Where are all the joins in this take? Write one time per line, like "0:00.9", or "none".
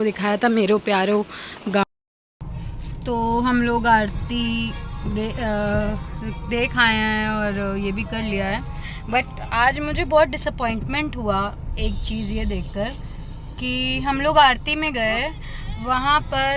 0:01.8